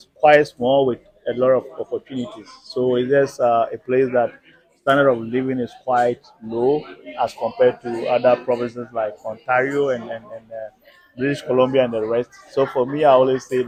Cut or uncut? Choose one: uncut